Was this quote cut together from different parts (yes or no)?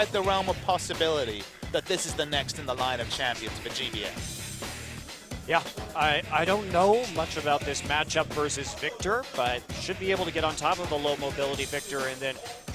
yes